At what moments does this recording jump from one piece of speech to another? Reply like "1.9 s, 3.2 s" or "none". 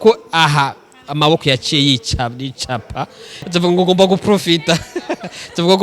3.3 s